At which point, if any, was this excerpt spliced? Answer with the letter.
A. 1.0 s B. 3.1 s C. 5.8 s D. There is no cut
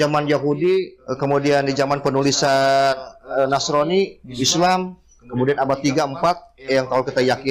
A